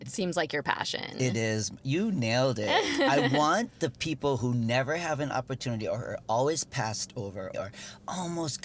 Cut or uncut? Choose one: cut